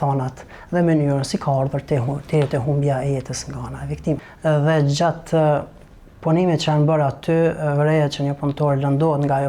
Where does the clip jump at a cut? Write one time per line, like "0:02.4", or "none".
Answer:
0:04.3